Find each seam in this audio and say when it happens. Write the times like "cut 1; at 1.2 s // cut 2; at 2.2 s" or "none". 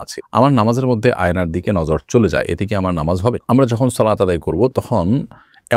none